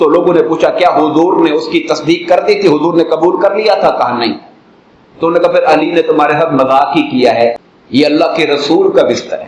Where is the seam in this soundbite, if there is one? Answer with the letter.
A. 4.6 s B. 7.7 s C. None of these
B